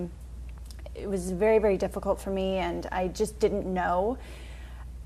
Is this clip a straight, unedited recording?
no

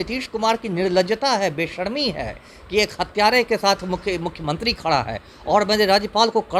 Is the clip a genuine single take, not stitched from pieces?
yes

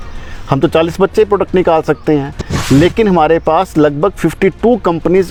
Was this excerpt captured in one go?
yes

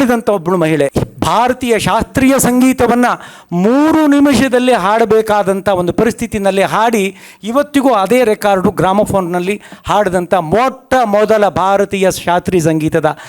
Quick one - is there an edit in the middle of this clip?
yes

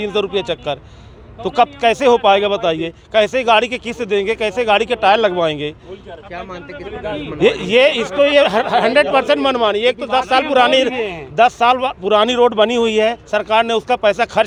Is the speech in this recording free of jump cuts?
yes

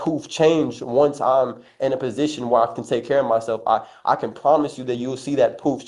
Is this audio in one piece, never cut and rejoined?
yes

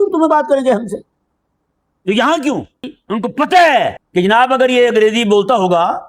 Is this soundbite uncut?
no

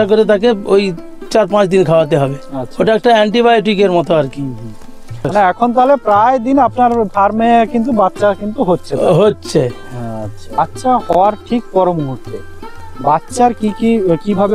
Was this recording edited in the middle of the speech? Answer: yes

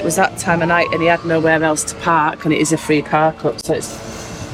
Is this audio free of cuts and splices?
yes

